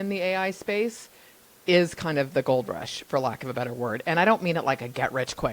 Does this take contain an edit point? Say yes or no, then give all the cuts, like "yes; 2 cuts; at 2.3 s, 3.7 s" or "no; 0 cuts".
no; 0 cuts